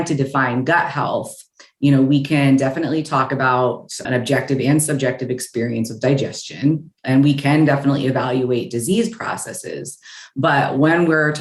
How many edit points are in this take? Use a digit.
0